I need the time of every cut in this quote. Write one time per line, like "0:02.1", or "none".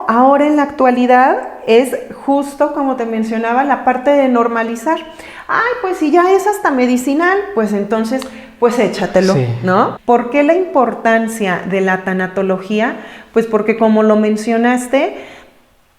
0:10.0